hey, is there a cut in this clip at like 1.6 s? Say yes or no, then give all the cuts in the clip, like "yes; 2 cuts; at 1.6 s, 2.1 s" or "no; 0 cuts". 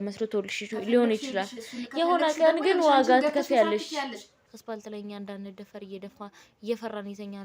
no; 1 cut; at 4.3 s